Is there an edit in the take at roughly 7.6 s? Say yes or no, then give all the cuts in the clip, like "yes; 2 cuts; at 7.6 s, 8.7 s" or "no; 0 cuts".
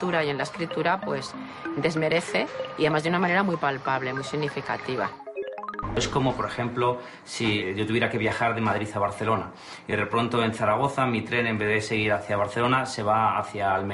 yes; 2 cuts; at 5.5 s, 7.6 s